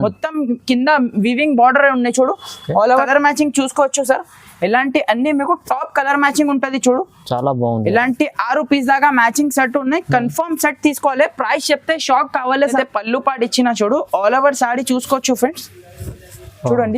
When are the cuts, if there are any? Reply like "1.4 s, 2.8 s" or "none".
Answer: 3.1 s, 12.8 s

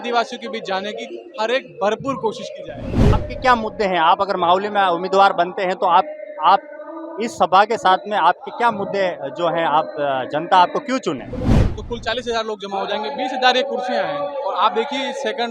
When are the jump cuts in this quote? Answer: 3.1 s, 11.6 s

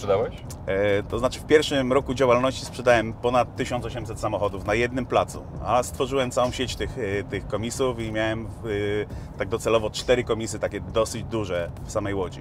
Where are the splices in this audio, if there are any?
none

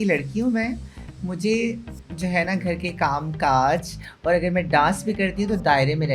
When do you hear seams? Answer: none

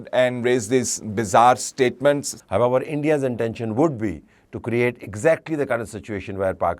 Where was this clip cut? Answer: 2.3 s

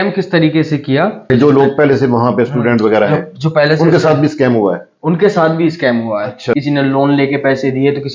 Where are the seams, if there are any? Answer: 1.2 s, 6.5 s

